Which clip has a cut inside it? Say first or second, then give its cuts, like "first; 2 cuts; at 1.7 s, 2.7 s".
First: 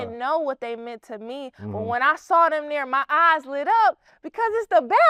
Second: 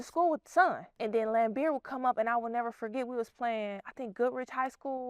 second; 1 cut; at 0.9 s